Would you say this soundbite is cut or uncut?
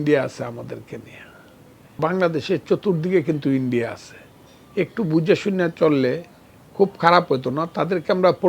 cut